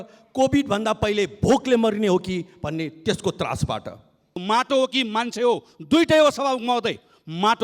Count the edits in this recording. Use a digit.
1